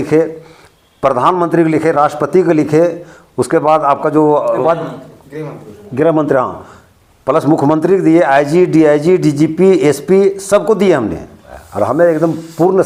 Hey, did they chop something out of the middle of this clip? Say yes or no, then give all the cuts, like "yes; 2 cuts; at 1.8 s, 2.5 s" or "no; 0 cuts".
no; 0 cuts